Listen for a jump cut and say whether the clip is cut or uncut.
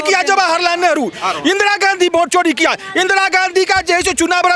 uncut